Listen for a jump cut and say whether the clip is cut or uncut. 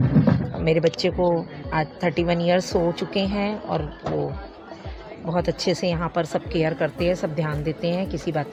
uncut